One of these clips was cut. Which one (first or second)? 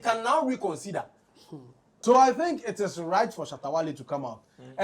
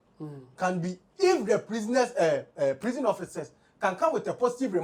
first